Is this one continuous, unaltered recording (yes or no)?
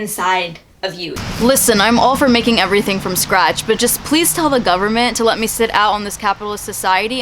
no